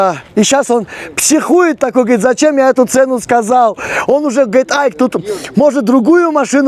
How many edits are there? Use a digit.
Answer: 0